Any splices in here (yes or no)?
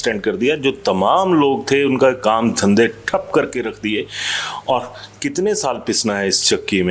no